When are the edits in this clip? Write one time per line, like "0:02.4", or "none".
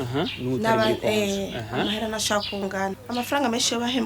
0:03.0